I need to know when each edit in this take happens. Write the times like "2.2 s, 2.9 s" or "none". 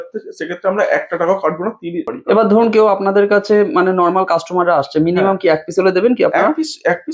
2.1 s